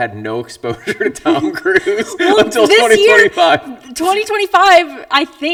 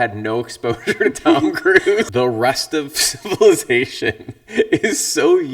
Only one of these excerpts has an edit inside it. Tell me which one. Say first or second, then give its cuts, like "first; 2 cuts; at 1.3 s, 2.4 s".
second; 1 cut; at 2.1 s